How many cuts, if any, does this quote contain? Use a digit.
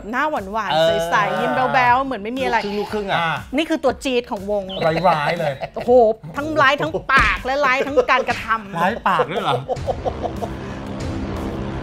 0